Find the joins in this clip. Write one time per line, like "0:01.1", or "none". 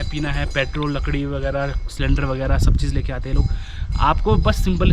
none